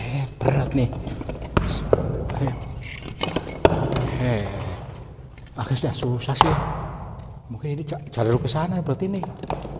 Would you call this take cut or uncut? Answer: uncut